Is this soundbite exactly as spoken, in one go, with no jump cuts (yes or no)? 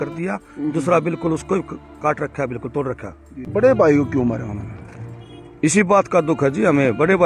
no